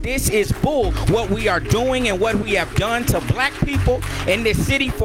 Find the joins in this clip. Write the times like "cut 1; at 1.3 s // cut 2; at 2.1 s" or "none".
cut 1; at 1.0 s